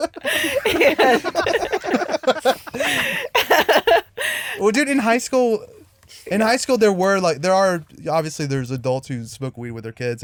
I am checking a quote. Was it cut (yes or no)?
no